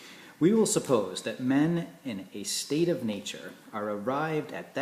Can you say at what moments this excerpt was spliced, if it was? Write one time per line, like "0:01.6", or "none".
none